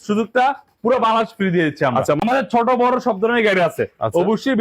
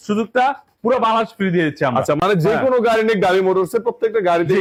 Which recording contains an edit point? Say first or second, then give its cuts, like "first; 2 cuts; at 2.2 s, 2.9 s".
first; 1 cut; at 2.2 s